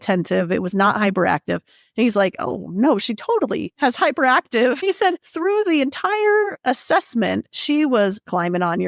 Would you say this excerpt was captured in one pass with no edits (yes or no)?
yes